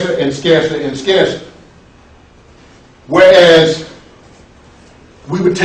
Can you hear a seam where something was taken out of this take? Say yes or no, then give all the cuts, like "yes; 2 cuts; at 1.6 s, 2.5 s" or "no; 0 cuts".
no; 0 cuts